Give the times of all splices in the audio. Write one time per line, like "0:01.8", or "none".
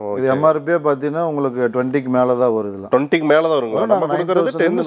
none